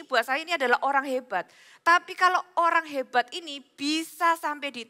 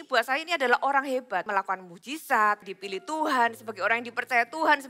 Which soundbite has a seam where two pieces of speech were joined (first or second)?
second